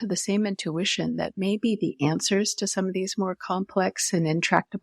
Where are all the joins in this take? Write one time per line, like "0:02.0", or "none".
none